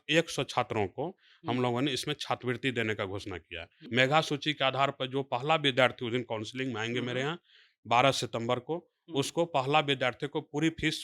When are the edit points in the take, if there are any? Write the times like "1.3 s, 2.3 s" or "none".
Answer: 3.7 s